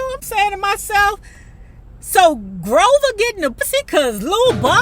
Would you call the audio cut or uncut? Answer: cut